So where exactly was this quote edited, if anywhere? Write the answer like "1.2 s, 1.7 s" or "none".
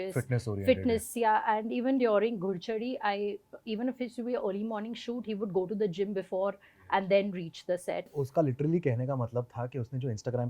8.1 s